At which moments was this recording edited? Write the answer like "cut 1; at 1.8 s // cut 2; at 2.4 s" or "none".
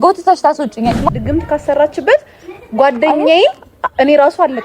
cut 1; at 1.1 s